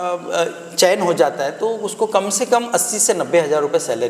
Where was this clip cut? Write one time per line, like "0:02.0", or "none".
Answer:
none